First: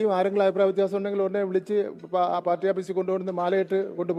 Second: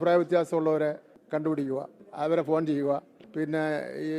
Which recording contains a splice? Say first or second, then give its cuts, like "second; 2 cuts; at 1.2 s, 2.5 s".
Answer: second; 3 cuts; at 1.1 s, 2.0 s, 3.2 s